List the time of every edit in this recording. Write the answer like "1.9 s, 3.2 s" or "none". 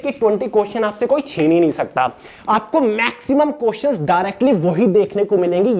2.3 s